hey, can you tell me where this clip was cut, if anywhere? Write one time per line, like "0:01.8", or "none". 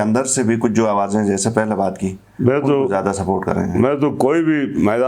none

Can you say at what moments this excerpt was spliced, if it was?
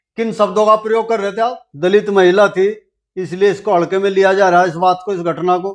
0:01.7

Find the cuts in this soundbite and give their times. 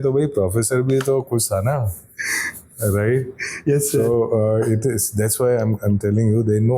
none

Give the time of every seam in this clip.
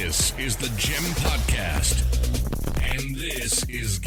none

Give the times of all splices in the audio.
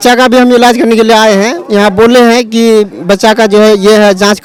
none

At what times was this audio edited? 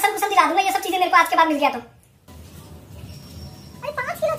0:02.3

